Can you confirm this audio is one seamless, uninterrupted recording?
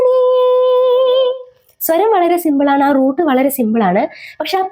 yes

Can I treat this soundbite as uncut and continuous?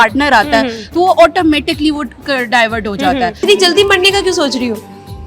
no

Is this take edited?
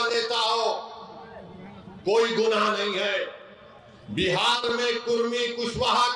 no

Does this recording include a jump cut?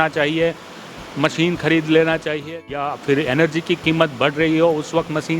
yes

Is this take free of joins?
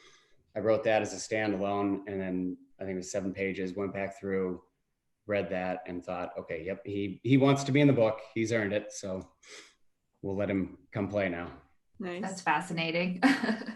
yes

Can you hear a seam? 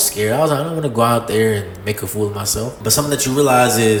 no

